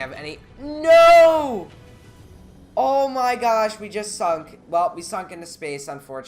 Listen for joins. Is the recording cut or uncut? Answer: uncut